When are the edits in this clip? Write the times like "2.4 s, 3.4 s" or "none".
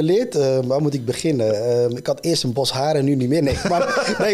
none